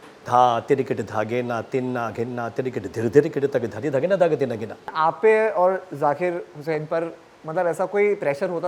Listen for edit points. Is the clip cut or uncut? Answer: cut